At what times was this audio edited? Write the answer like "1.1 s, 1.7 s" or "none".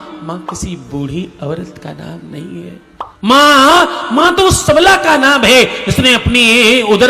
3.1 s